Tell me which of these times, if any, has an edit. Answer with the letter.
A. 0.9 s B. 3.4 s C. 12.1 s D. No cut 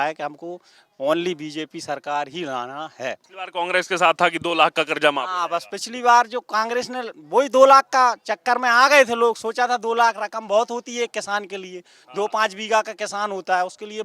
B